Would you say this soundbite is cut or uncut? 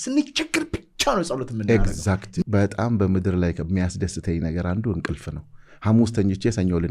cut